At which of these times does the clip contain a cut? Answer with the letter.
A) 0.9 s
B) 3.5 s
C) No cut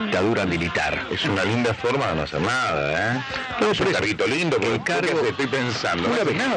A